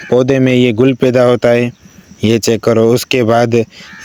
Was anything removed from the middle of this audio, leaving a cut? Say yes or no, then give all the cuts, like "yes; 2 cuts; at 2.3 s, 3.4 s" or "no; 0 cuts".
no; 0 cuts